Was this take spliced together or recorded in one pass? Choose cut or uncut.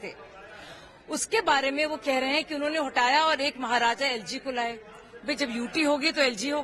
uncut